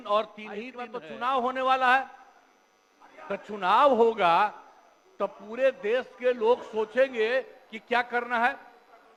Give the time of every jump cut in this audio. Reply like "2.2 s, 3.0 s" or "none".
none